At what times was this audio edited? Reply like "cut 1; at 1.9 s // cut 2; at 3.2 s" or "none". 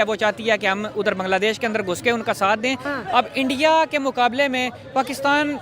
cut 1; at 2.9 s